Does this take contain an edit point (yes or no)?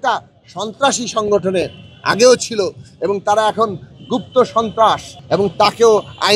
yes